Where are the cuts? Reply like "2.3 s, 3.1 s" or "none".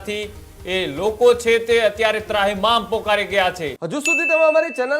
3.7 s